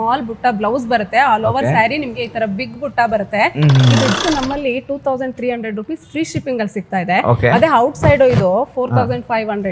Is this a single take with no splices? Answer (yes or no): no